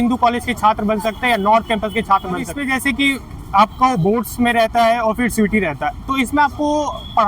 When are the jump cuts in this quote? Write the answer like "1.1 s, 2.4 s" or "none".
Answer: 2.5 s